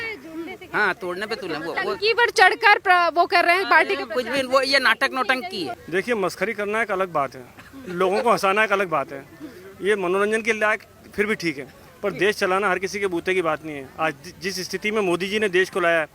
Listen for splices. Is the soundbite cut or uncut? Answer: cut